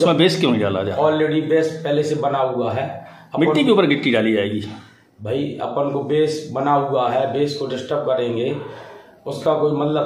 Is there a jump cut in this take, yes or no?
no